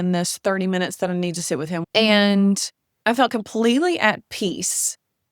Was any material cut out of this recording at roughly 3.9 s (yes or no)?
no